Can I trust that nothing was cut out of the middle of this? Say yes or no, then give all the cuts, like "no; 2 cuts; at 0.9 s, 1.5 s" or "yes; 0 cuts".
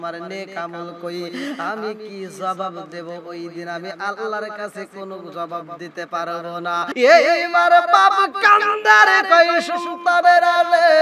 no; 1 cut; at 7.0 s